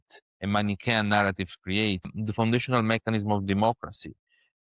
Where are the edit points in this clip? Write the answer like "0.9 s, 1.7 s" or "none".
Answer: 2.1 s